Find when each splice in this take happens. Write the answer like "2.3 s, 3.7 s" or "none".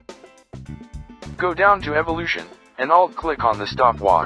1.4 s